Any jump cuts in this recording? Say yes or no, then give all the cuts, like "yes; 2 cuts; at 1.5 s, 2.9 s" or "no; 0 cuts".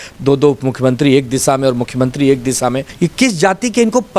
yes; 1 cut; at 2.9 s